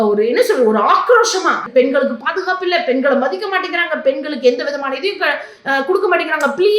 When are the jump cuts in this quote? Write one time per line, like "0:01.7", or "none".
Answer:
0:01.7